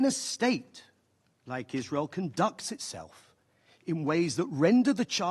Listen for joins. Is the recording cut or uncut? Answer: uncut